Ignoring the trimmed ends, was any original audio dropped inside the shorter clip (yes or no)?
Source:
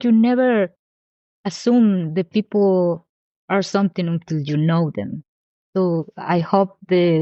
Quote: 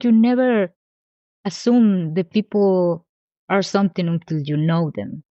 no